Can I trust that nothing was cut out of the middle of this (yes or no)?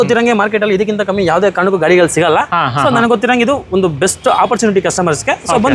yes